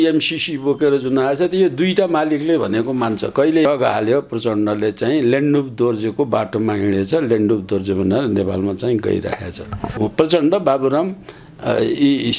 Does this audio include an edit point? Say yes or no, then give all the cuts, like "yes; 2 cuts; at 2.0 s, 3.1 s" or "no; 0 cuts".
yes; 2 cuts; at 3.6 s, 9.9 s